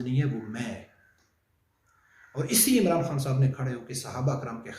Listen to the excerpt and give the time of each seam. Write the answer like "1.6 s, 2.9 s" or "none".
none